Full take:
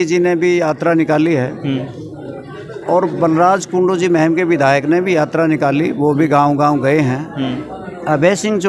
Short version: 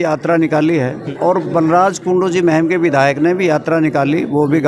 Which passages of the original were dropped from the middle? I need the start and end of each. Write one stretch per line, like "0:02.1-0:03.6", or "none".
0:01.6-0:02.7